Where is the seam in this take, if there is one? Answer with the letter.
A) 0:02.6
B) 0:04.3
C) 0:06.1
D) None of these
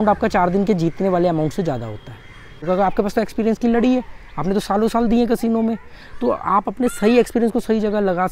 A